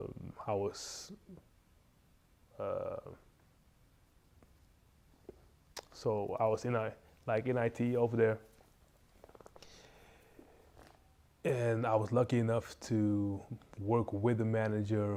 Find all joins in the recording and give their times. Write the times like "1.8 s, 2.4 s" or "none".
none

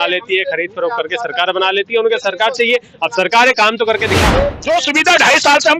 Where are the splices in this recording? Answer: 4.6 s

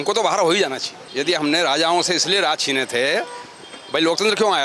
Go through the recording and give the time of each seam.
1.0 s

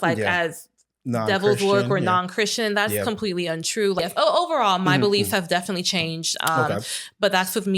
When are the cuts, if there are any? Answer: 4.0 s

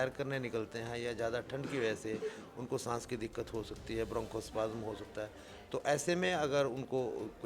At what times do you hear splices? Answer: none

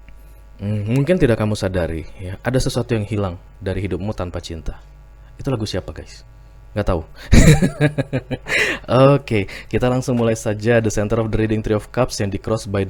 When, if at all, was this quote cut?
none

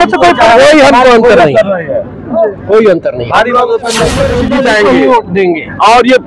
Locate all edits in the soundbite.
4.4 s

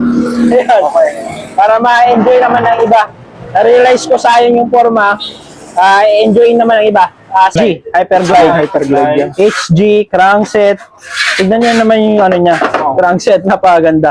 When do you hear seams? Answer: 7.5 s

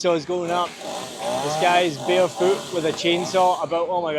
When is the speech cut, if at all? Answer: none

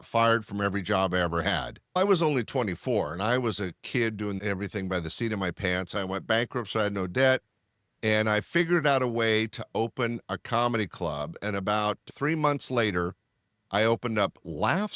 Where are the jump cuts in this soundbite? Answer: 1.8 s, 6.0 s

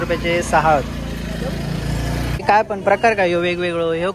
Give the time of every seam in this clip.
2.4 s

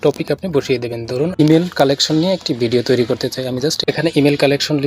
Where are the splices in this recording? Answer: 1.4 s, 3.9 s

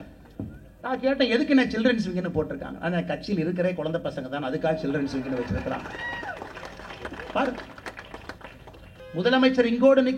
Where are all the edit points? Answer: 9.0 s

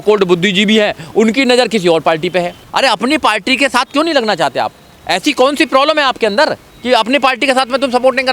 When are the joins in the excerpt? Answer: 2.6 s

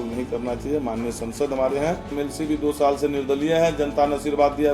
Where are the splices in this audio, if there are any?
2.1 s

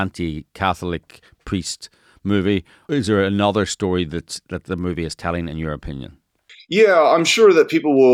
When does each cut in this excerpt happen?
2.8 s

